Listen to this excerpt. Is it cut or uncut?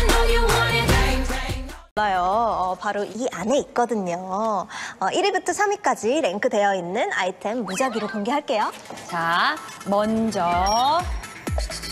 uncut